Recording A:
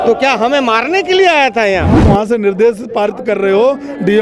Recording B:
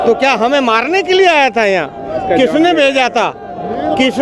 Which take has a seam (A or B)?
A